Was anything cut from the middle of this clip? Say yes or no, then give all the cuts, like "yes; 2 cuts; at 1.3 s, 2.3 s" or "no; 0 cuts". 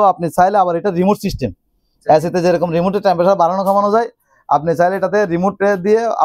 no; 0 cuts